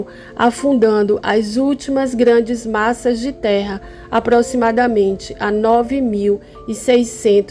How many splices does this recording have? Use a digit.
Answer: 0